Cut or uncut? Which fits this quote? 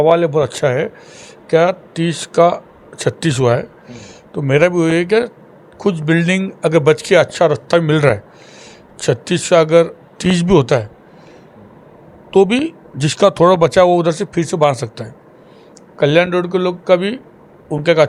uncut